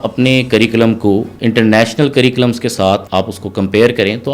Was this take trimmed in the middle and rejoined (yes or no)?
yes